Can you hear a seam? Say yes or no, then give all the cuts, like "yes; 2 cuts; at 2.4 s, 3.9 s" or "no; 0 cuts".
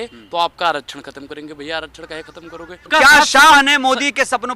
yes; 1 cut; at 2.9 s